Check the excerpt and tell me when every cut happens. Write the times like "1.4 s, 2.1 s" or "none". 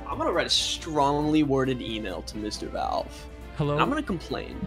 none